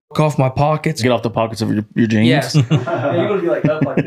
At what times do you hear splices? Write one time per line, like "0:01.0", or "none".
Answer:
0:01.0
0:02.5